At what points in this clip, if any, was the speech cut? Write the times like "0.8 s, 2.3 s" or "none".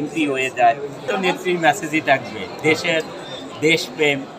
0.9 s